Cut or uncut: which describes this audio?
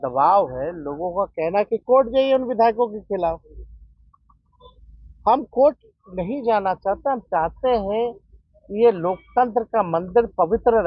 uncut